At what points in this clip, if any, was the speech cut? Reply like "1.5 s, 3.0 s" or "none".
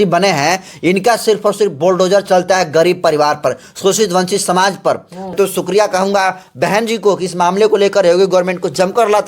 5.4 s